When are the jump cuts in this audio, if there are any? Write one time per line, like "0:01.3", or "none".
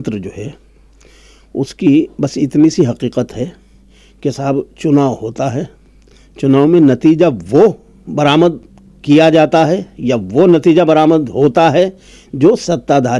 none